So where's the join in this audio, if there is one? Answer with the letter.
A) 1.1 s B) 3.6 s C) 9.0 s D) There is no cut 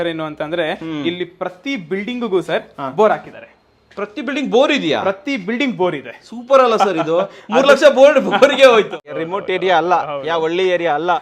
C